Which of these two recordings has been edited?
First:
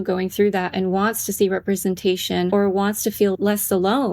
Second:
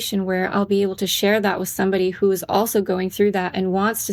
first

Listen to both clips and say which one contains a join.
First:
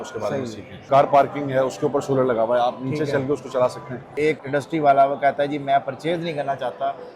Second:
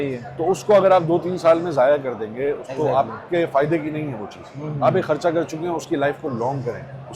first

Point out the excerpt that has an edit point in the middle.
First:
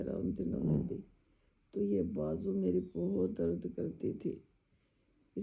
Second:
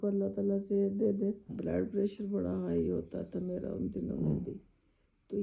second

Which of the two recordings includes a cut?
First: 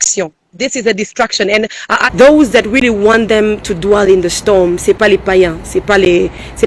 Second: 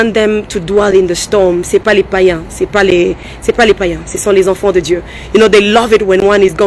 first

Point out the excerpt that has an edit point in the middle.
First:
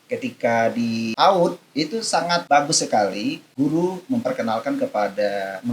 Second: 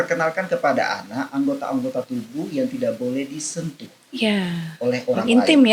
first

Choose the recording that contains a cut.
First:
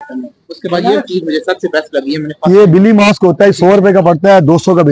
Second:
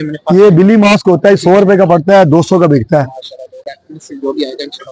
second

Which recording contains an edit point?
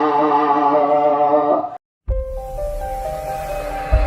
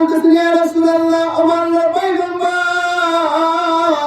first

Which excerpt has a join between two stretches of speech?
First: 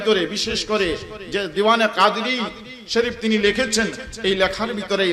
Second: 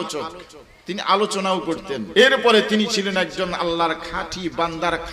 second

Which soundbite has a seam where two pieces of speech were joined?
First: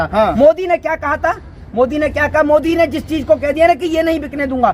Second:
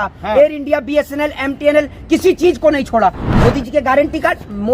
second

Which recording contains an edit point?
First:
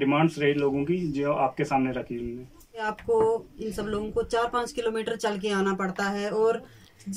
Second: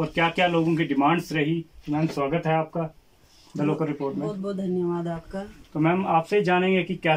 first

